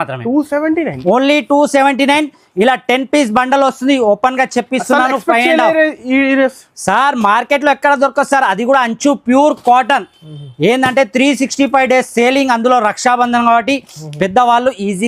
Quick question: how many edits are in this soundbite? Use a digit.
0